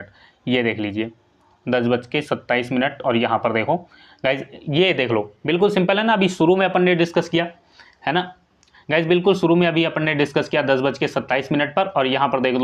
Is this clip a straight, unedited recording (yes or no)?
yes